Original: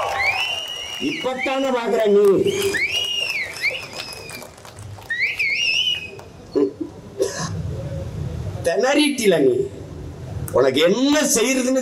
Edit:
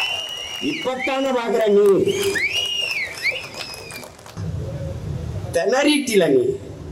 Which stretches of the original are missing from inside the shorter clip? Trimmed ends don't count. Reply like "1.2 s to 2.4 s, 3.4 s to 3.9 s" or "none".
4.8 s to 7.5 s